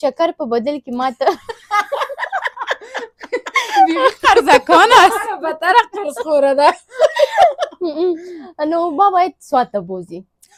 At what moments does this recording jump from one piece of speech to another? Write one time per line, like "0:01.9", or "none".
none